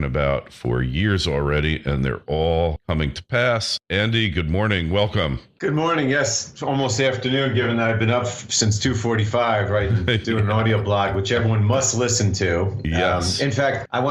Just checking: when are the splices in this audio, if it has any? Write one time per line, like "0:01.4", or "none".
0:06.7